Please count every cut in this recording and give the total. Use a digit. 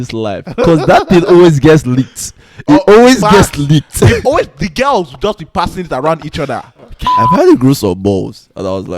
1